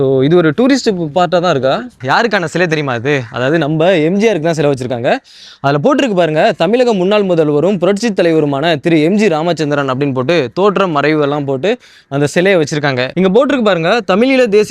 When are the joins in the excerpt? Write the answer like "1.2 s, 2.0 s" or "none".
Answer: 2.0 s, 13.1 s